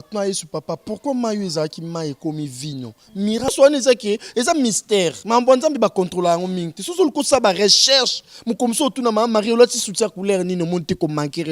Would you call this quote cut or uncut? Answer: cut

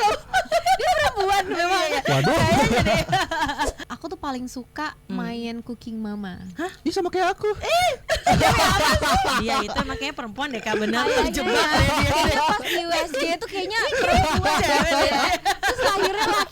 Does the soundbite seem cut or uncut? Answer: cut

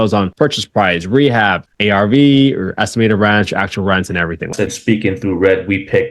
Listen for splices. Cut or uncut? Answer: cut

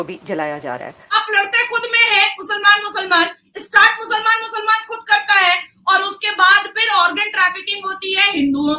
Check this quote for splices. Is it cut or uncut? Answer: cut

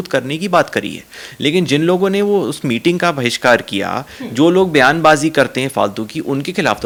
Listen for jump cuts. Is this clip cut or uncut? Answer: uncut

